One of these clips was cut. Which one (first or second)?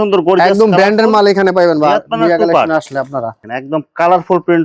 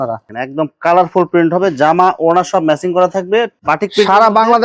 second